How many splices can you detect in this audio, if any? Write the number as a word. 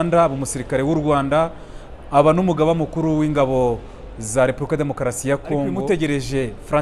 one